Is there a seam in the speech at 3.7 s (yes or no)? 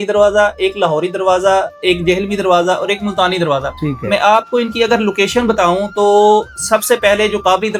no